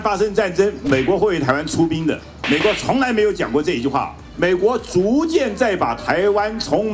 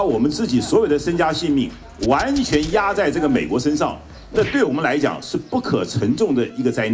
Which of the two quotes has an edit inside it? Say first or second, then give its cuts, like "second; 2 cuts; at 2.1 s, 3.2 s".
first; 2 cuts; at 2.3 s, 4.2 s